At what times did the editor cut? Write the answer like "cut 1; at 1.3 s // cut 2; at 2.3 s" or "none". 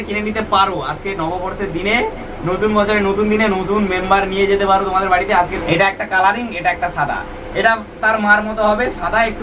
cut 1; at 5.4 s